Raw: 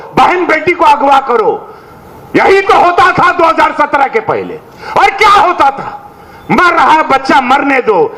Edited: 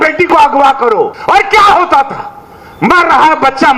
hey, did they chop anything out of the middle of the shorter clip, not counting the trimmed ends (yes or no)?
yes